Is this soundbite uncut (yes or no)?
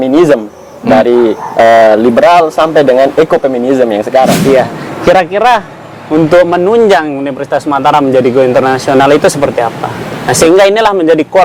no